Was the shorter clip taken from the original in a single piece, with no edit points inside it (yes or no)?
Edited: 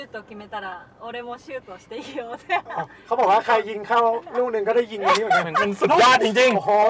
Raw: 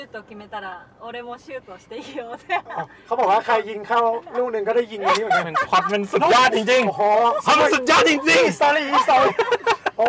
no